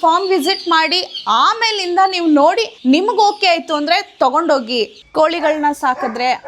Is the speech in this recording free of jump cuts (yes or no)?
no